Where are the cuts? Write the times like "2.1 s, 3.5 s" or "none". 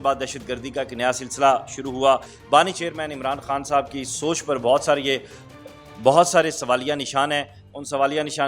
2.3 s